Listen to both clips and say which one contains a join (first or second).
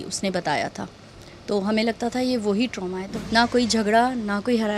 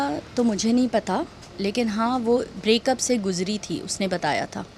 first